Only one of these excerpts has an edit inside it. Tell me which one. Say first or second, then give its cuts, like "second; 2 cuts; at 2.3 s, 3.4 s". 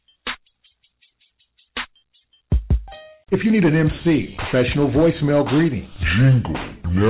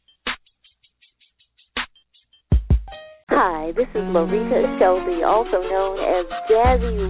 first; 1 cut; at 3.2 s